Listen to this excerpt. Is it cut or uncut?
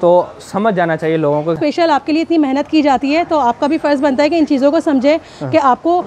cut